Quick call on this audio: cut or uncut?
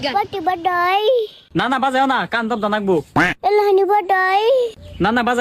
uncut